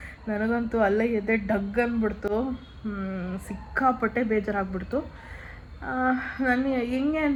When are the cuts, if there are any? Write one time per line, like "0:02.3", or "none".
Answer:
none

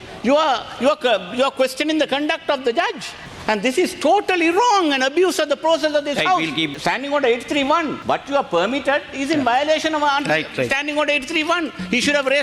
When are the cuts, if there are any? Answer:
0:06.7
0:08.0

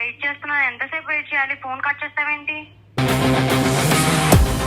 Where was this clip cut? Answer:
none

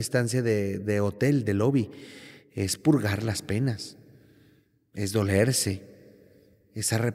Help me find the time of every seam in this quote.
none

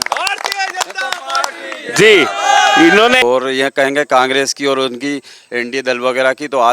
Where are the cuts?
0:03.2

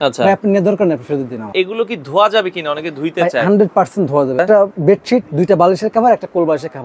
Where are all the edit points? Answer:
0:01.5
0:04.4

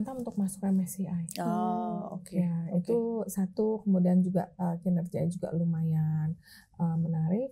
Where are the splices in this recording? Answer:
none

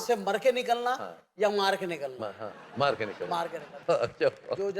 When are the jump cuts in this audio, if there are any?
0:03.8

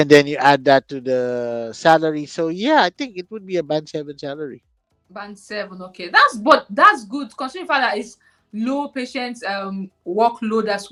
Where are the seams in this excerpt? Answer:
none

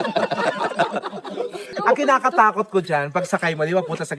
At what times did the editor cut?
0:01.7

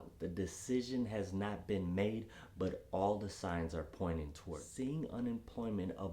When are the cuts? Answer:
0:04.6

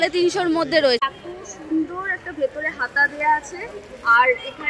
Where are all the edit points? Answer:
0:01.0

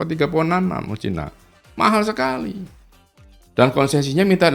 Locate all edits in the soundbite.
none

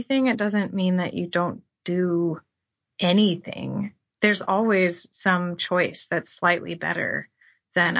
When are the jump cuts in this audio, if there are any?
none

